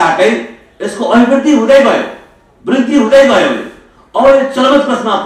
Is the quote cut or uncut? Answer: uncut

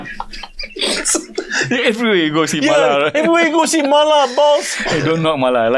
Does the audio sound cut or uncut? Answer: uncut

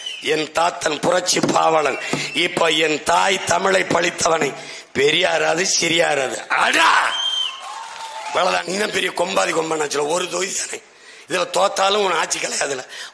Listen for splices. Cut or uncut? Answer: cut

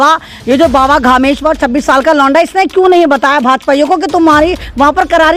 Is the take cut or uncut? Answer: uncut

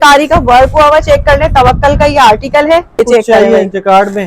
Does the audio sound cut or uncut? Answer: cut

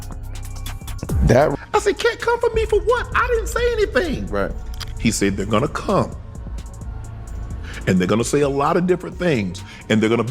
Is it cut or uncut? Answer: cut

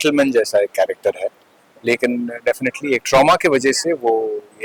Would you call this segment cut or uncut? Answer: uncut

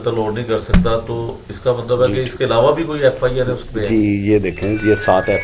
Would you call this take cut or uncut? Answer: uncut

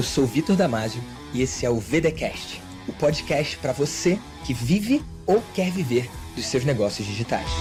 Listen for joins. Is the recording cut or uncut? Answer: uncut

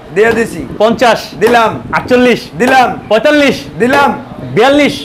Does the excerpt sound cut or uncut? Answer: uncut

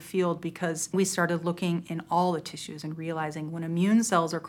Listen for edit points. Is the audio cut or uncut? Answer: cut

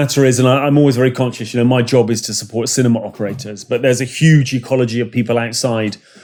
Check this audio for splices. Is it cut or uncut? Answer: uncut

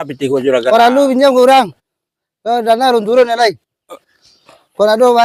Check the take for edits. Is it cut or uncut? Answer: uncut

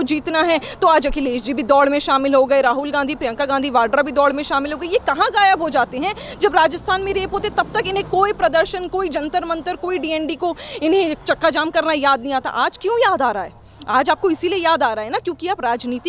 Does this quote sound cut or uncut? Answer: uncut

